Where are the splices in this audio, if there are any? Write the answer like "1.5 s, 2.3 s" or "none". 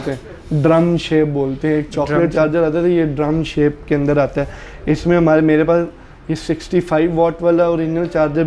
none